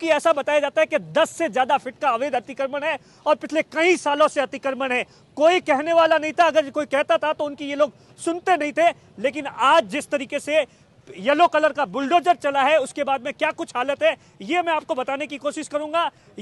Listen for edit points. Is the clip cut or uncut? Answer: uncut